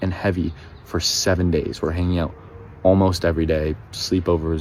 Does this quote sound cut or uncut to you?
uncut